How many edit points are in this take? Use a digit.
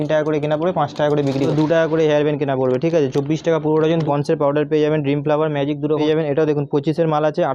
3